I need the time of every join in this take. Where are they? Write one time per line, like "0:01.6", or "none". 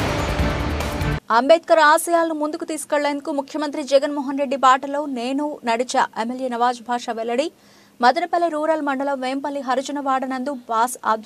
0:01.1

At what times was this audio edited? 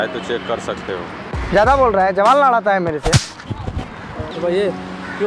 0:01.3
0:04.3

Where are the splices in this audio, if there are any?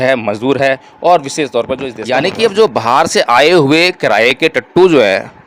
0:01.9

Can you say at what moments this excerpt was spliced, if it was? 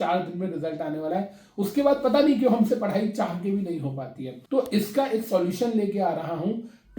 0:04.3

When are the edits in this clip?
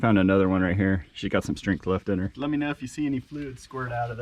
0:02.3

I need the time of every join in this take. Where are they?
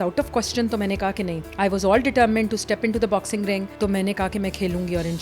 0:01.4
0:03.7

